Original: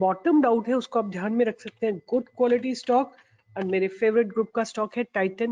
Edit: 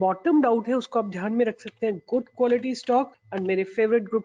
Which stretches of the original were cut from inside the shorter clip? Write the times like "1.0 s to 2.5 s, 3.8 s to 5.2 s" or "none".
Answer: 3.2 s to 3.5 s